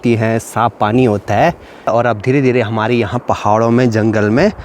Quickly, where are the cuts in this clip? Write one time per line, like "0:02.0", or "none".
0:01.9